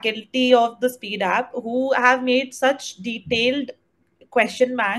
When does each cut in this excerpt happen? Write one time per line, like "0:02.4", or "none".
none